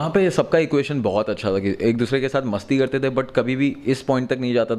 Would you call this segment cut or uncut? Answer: uncut